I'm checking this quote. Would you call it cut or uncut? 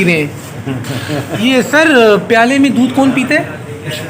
cut